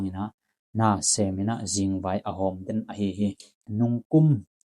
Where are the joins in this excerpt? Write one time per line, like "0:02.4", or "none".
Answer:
0:03.6

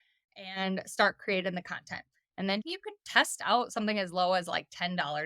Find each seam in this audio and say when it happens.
0:02.7

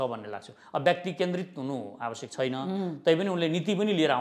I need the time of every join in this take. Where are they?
none

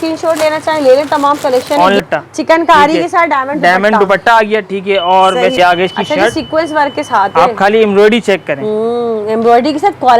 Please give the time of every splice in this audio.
0:02.0
0:05.5

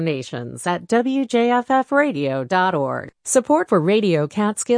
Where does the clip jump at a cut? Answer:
0:03.1

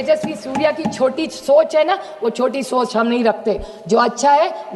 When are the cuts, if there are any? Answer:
none

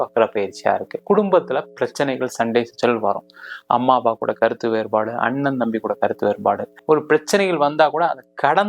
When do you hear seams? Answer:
0:00.9
0:06.7

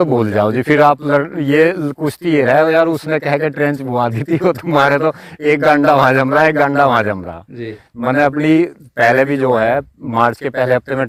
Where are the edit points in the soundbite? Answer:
none

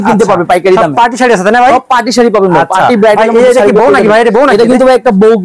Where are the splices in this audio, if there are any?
none

